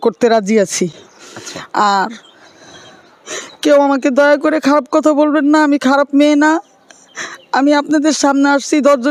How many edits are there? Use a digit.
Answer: 0